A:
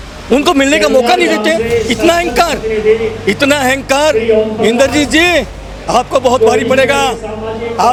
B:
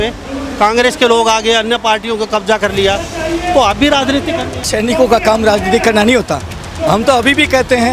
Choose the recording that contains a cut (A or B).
B